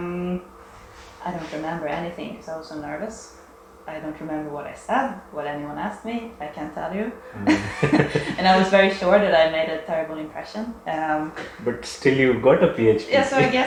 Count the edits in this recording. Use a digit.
0